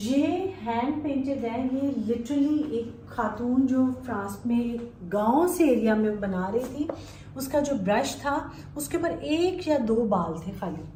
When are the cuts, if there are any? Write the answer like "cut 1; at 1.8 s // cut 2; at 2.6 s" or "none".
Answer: none